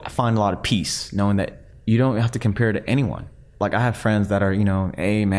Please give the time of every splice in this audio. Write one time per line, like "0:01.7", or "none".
0:01.7
0:03.5